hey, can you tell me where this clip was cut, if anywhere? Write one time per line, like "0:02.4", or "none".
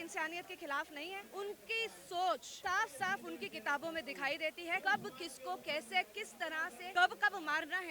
0:01.2
0:02.5
0:04.8
0:06.8